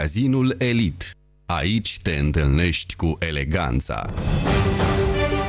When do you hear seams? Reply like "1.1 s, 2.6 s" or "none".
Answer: 4.1 s